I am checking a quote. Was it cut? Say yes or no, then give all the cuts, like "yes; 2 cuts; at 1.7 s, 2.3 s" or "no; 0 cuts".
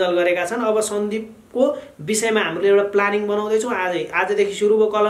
no; 0 cuts